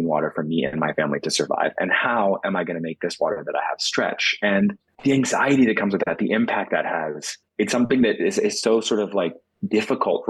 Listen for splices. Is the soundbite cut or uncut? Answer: cut